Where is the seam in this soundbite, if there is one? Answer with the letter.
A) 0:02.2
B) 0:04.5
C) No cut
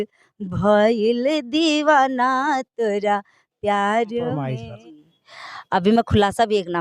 B